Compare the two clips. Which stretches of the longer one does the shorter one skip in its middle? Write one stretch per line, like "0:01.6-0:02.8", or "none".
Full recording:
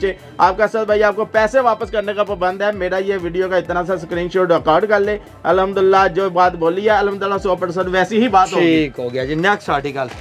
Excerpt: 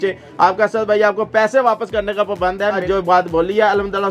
0:02.8-0:06.1